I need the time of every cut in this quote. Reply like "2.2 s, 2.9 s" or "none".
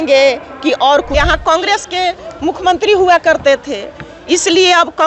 1.1 s